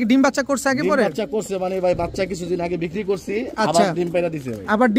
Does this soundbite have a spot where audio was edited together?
no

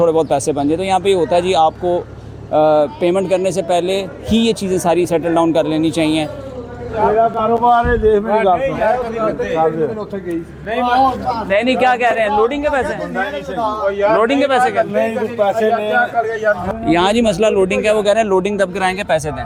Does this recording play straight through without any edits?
yes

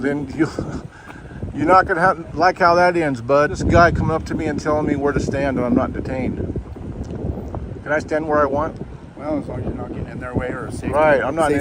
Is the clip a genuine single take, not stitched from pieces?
no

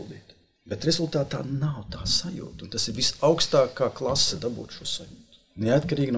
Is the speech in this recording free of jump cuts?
yes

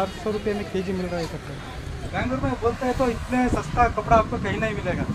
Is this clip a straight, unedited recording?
no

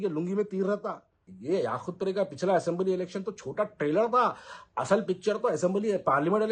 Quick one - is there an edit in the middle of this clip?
yes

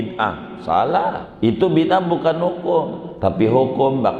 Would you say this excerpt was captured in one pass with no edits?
no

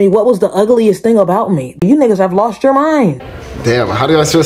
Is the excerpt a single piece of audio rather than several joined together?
no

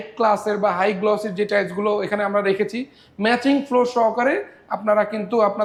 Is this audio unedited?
yes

